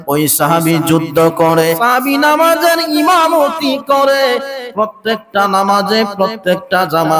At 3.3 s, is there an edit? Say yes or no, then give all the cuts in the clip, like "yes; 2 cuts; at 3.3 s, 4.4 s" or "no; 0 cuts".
no; 1 cut; at 1.8 s